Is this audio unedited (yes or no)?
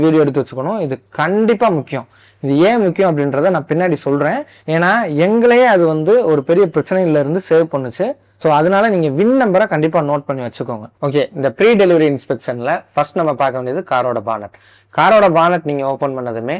yes